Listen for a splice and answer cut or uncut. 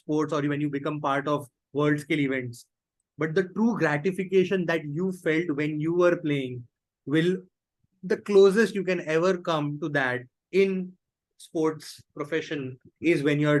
uncut